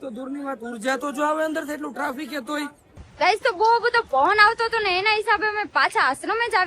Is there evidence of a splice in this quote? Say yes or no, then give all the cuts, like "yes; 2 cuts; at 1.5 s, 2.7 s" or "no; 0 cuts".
yes; 1 cut; at 2.8 s